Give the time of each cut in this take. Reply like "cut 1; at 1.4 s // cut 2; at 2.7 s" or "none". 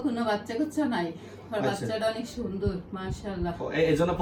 none